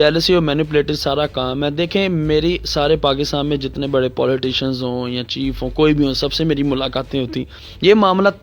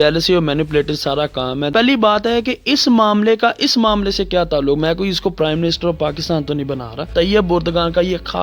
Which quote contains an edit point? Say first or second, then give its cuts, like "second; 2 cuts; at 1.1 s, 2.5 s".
second; 2 cuts; at 1.7 s, 7.1 s